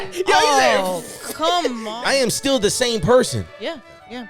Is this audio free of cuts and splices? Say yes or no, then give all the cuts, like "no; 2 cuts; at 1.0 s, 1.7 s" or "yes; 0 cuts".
no; 1 cut; at 1.8 s